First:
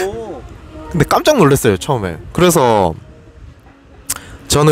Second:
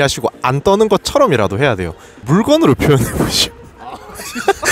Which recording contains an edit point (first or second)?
second